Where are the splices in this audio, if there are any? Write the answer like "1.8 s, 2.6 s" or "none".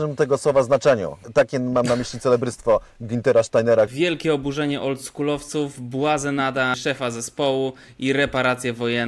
1.2 s, 3.9 s, 6.8 s